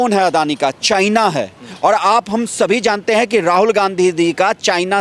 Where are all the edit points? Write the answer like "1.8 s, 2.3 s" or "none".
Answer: none